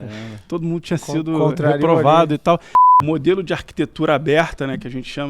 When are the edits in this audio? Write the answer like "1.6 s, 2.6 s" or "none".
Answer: 2.7 s